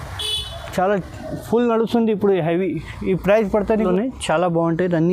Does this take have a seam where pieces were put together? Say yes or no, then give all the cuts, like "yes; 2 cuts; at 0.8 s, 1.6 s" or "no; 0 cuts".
yes; 1 cut; at 3.9 s